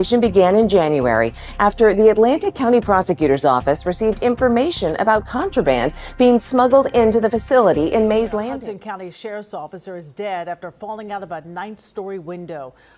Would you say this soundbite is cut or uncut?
cut